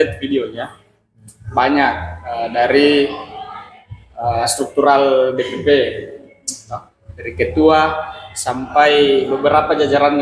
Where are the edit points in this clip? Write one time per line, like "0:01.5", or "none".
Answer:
none